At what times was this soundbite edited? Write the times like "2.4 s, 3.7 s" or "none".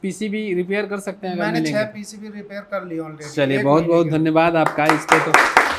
none